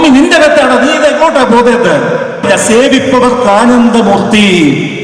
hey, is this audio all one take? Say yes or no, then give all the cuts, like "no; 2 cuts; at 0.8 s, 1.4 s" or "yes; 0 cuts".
no; 1 cut; at 2.4 s